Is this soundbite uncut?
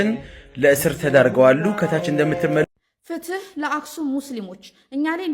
no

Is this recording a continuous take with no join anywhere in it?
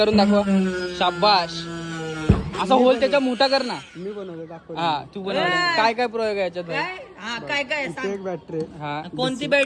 yes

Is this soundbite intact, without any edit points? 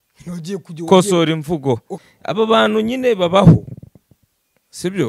no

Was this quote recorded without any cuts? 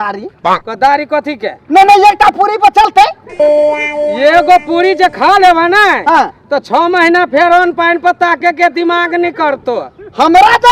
no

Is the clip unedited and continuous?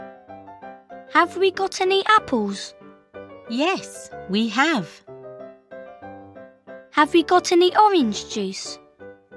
no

